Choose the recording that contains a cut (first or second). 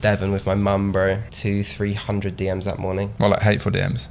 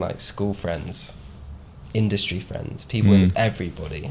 first